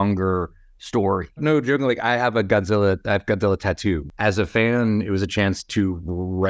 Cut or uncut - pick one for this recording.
cut